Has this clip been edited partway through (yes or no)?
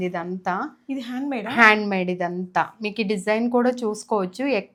no